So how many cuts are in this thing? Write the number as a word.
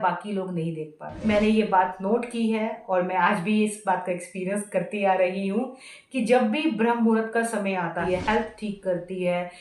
two